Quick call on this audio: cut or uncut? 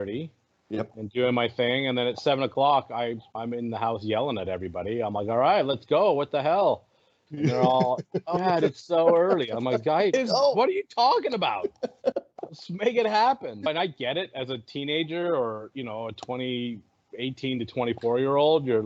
uncut